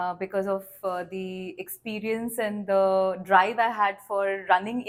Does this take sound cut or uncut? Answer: uncut